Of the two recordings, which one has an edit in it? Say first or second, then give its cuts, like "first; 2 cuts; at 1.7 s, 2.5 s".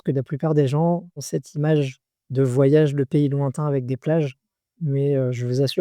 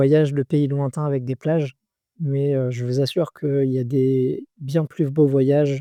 first; 1 cut; at 1.2 s